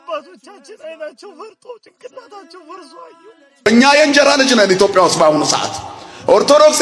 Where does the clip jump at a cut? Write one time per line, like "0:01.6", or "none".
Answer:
0:03.6